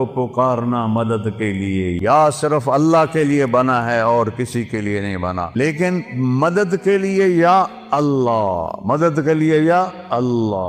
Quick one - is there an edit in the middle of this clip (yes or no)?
yes